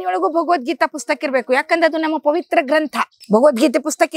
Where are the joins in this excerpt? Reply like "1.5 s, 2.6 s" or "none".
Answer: 3.2 s